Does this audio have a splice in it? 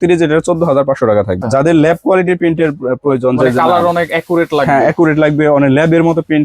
yes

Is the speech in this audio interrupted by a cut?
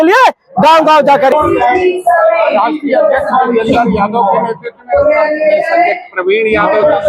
yes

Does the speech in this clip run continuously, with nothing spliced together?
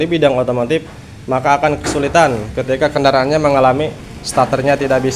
yes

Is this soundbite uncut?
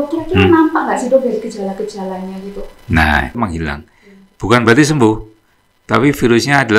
no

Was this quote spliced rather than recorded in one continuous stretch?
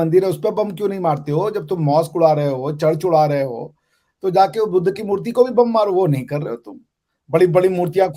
no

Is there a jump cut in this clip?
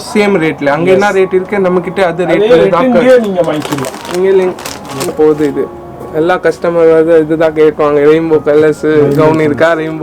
yes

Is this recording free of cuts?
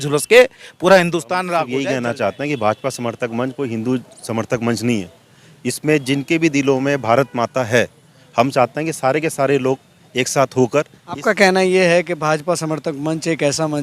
no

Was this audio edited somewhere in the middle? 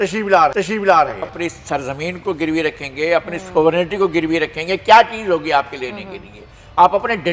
yes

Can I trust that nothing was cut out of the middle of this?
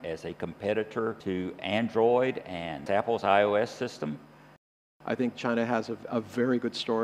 no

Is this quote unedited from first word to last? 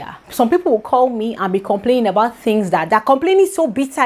yes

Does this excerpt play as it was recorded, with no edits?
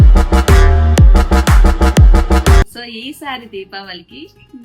no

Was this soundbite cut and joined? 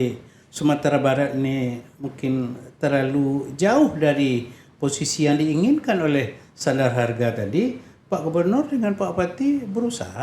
no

